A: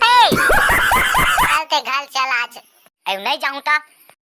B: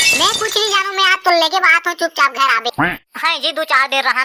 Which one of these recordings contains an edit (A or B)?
A